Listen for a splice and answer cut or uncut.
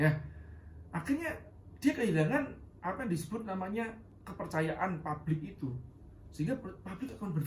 cut